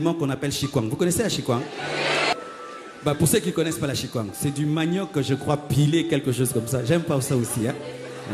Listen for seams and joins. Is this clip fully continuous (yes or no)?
no